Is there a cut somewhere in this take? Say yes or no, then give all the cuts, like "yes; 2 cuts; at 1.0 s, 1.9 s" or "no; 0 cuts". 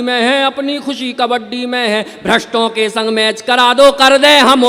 no; 0 cuts